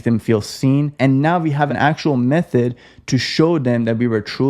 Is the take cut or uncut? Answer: cut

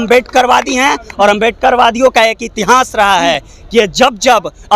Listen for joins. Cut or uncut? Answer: uncut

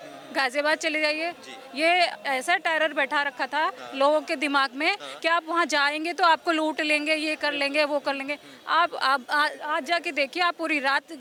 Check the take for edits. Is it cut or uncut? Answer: uncut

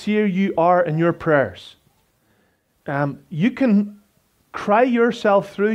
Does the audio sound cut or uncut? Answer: uncut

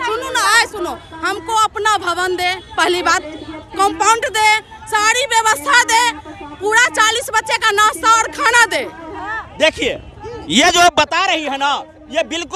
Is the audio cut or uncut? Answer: uncut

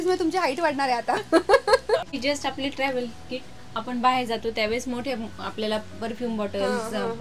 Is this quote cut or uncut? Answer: uncut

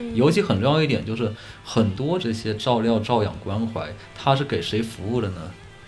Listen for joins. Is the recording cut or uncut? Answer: cut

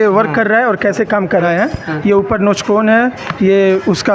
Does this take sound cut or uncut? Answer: cut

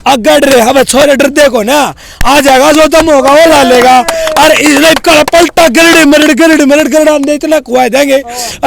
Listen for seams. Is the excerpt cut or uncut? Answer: uncut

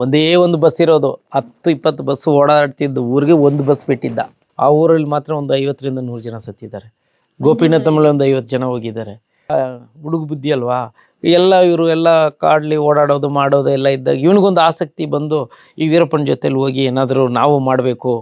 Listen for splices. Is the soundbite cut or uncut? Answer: cut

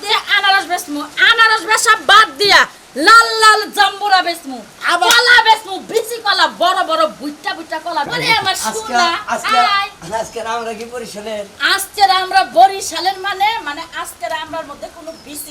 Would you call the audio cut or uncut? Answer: cut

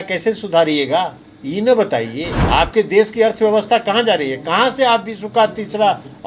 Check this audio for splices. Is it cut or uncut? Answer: cut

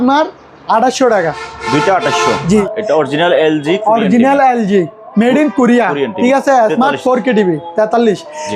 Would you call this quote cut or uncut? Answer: cut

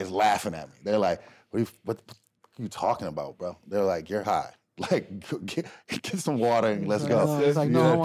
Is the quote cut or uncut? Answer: uncut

